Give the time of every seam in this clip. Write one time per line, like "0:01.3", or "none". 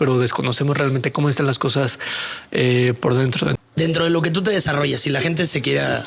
0:03.6